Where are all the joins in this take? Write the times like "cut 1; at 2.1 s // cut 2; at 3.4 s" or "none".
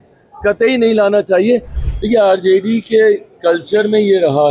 cut 1; at 1.8 s